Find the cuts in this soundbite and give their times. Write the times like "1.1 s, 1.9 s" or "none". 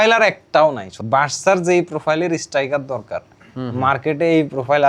0.9 s